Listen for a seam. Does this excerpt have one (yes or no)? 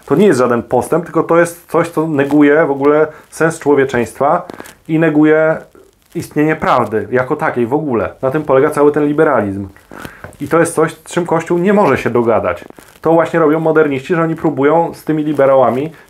no